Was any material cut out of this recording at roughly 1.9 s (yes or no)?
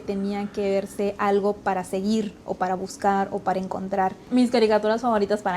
no